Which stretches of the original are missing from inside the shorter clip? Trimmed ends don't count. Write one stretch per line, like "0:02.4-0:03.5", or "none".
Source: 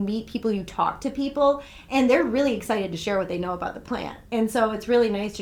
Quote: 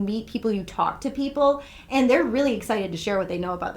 none